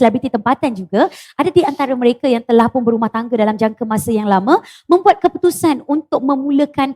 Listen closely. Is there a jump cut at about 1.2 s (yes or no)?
no